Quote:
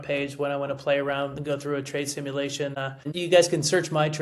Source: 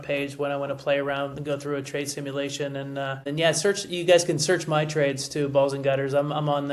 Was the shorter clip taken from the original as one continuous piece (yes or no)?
no